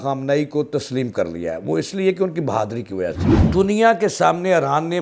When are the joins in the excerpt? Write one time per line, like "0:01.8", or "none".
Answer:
0:03.3

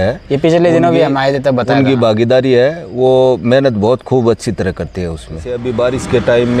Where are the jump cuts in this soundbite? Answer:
0:05.6

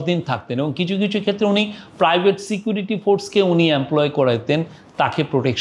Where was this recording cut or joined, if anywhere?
none

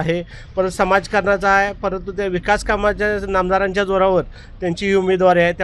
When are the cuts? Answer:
none

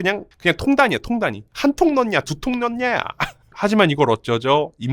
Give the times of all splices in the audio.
0:03.5

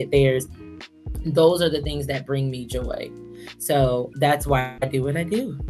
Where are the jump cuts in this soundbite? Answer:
0:04.7

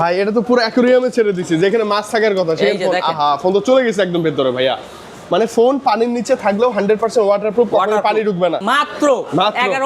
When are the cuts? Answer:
0:08.6

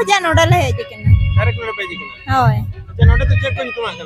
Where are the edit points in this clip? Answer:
none

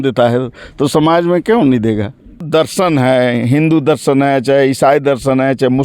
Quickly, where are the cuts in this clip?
0:02.4

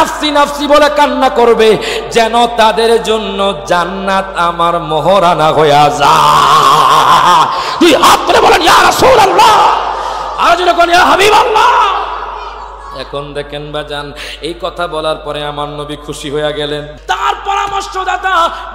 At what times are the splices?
0:16.9

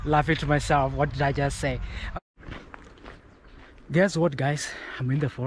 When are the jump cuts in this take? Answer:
0:02.0

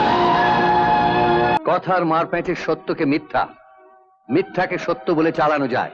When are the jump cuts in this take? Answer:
0:01.6

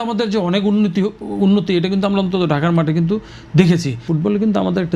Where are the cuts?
0:04.0

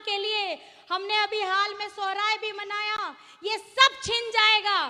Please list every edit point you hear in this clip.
none

